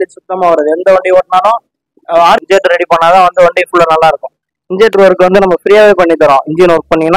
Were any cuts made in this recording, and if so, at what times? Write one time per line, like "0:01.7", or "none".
0:02.4